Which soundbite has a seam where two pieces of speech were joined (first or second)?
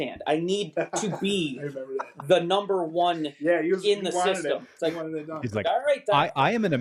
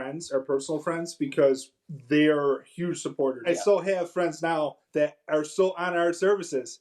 second